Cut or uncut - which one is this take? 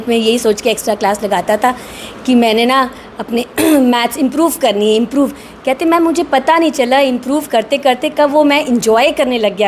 uncut